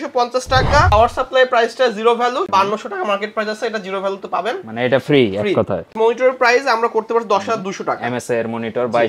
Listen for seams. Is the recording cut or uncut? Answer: cut